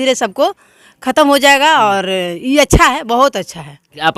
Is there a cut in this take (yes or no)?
no